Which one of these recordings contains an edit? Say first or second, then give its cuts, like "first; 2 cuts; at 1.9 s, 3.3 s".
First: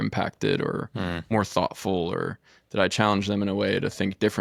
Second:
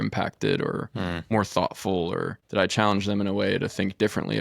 second; 1 cut; at 2.4 s